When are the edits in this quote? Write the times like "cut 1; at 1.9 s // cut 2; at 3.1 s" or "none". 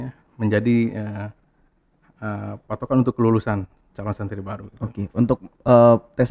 none